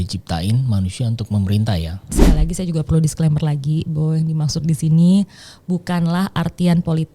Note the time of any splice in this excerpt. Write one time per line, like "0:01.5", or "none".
0:02.2